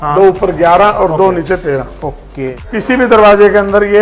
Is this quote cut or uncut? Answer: cut